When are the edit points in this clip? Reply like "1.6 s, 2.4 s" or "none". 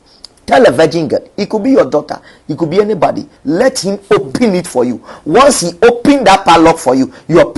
3.3 s